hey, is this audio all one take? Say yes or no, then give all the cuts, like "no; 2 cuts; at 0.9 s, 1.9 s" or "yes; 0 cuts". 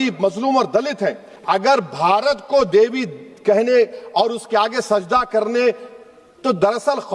no; 1 cut; at 1.3 s